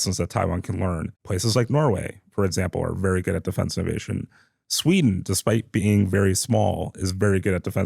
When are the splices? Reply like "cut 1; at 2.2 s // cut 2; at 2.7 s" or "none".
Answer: cut 1; at 1.1 s